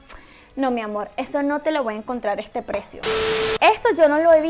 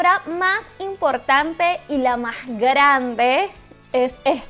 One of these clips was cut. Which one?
first; 1 cut; at 2.9 s

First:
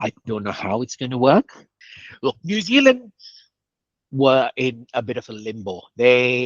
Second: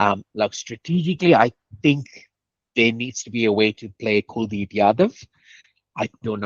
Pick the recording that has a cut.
first; 1 cut; at 1.8 s

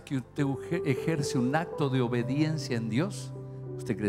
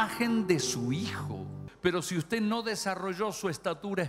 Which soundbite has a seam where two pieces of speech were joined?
second; 1 cut; at 1.6 s

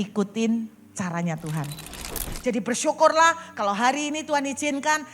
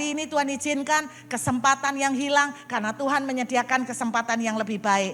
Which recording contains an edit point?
first; 1 cut; at 2.3 s

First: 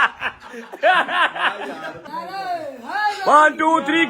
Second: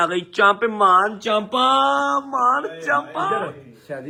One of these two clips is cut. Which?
first; 1 cut; at 2.1 s

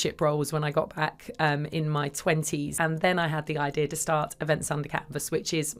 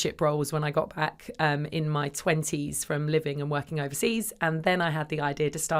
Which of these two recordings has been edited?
first; 1 cut; at 2.7 s

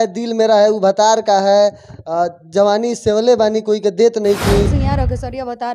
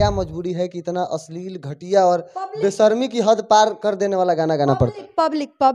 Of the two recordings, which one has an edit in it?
first; 1 cut; at 4.8 s

